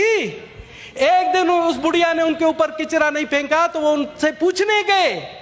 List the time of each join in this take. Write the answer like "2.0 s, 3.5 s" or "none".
none